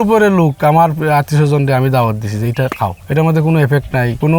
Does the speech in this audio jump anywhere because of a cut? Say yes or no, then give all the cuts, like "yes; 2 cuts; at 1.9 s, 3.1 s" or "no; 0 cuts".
no; 0 cuts